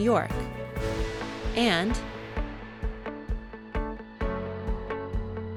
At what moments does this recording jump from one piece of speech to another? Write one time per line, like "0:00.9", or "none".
none

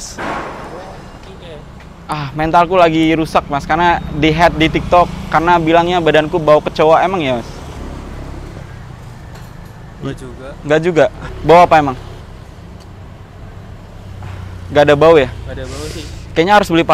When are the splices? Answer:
0:07.8
0:11.3
0:12.2

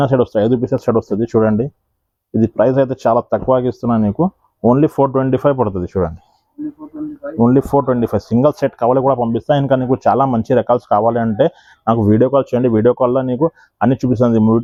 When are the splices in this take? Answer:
none

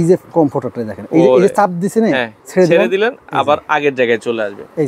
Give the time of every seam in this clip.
0:02.4

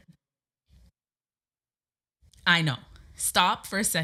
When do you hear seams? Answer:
none

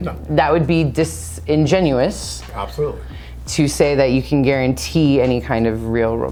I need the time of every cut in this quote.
none

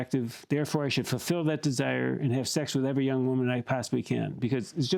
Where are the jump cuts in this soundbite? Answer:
none

